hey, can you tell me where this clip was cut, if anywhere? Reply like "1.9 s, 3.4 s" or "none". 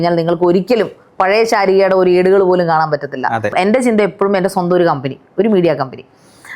3.5 s